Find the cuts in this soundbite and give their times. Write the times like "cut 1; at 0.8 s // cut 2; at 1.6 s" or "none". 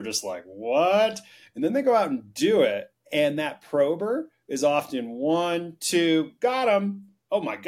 cut 1; at 2.9 s